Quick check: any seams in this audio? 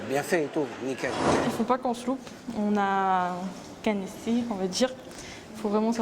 yes; 1 cut; at 1.3 s

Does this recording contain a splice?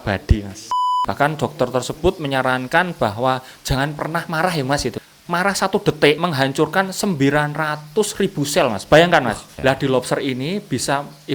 yes; 4 cuts; at 0.9 s, 5.0 s, 6.2 s, 9.5 s

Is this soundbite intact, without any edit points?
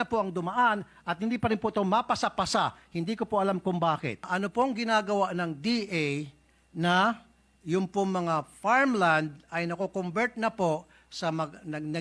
no; 1 cut; at 4.3 s

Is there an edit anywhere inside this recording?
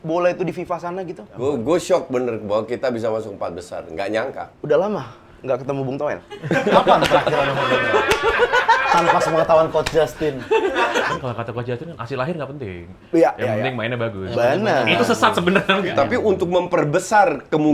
yes; 4 cuts; at 1.3 s, 4.5 s, 11.1 s, 15.8 s

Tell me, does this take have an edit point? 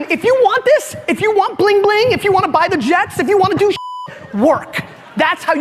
no; 0 cuts

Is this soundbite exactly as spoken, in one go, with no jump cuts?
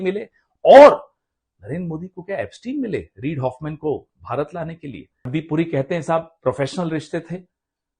no; 1 cut; at 5.2 s

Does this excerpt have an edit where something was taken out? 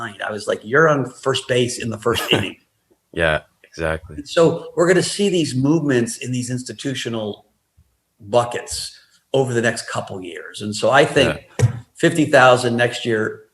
no; 0 cuts

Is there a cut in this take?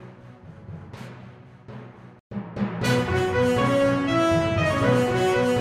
no; 0 cuts

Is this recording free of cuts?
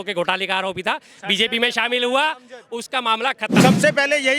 no; 1 cut; at 3.5 s

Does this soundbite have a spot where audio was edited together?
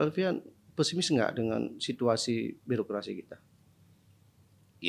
no; 0 cuts

